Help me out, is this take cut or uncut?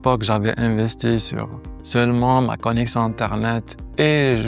uncut